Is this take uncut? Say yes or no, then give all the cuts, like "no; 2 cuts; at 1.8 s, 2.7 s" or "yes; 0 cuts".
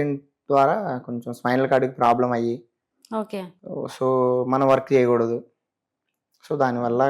yes; 0 cuts